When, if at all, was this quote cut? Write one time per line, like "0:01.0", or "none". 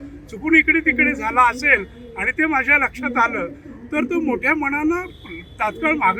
none